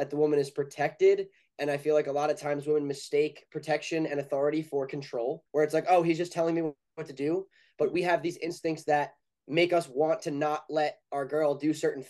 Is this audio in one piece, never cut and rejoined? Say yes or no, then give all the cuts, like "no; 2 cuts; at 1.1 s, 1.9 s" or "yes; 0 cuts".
no; 1 cut; at 5.4 s